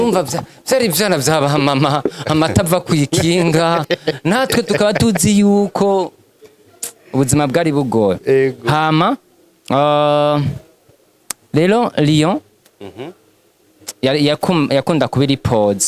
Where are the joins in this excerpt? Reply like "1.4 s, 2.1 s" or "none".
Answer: none